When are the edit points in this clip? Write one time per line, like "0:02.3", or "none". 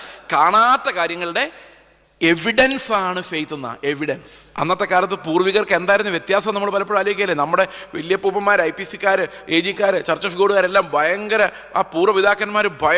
0:04.4